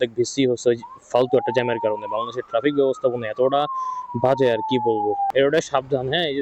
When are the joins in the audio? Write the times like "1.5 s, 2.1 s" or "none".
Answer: 5.3 s